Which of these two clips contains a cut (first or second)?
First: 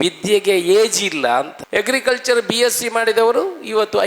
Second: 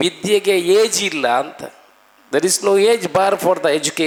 first